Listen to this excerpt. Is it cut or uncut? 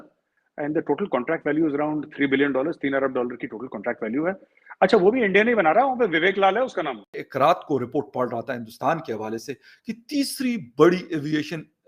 cut